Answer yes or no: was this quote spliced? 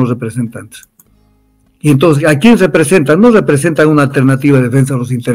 no